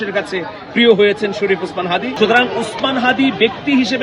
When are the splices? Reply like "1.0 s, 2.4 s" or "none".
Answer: 2.1 s